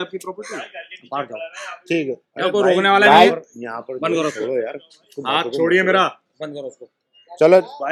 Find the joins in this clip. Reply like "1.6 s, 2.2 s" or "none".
none